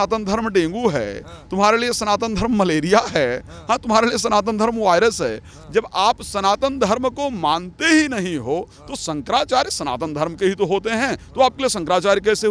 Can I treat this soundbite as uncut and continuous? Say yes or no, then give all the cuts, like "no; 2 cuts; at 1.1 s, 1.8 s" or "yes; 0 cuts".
yes; 0 cuts